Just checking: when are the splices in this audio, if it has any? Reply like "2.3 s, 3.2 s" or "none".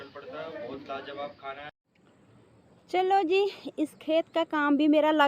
1.7 s